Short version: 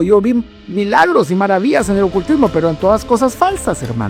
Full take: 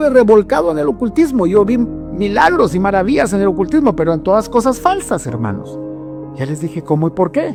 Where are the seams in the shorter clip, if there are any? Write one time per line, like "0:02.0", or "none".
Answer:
none